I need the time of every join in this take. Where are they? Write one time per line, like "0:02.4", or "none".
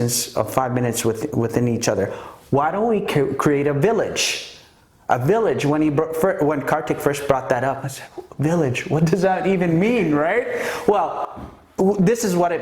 none